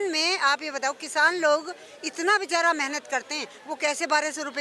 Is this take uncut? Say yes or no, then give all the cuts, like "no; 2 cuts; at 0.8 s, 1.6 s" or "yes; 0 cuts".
yes; 0 cuts